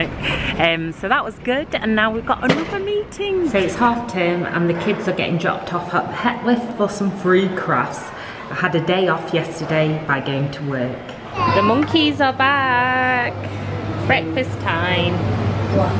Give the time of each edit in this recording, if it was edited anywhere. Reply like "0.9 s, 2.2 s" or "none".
none